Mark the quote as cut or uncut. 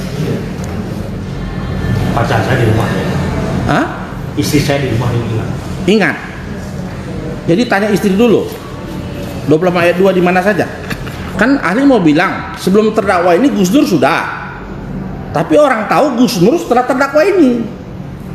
cut